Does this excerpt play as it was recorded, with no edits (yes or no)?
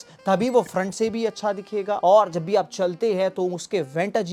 yes